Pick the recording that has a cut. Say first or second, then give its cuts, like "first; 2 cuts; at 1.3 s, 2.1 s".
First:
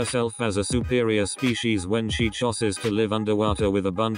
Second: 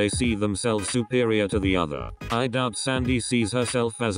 second; 1 cut; at 2.2 s